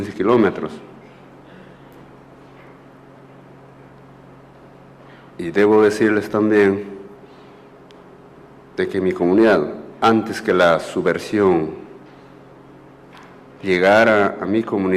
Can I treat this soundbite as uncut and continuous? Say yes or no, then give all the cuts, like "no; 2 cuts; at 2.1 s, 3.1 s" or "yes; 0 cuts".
yes; 0 cuts